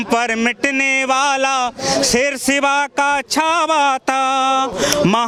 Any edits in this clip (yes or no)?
no